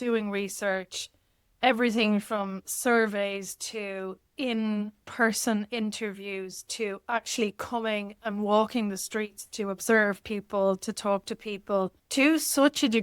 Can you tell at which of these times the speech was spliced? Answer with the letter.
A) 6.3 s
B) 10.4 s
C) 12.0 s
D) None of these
C